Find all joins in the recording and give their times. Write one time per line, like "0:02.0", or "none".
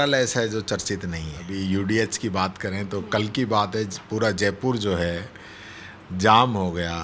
0:01.4